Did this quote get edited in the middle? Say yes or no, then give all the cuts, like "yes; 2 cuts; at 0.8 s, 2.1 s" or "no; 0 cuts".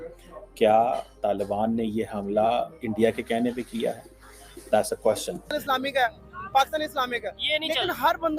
yes; 1 cut; at 5.6 s